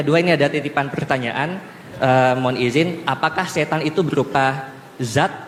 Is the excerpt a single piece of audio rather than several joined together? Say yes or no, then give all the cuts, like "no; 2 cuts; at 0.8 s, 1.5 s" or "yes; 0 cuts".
yes; 0 cuts